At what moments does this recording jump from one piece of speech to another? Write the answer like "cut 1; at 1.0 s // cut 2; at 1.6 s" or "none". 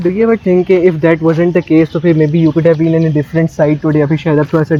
none